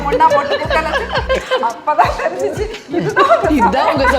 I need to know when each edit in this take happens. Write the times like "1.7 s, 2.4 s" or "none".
1.2 s